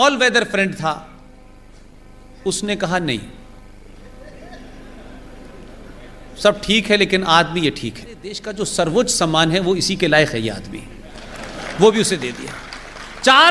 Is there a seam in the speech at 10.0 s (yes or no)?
no